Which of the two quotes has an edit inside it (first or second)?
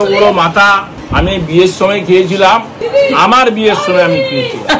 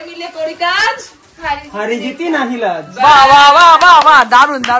first